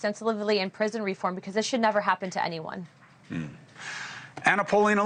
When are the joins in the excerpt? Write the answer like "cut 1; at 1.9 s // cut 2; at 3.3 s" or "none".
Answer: cut 1; at 1.4 s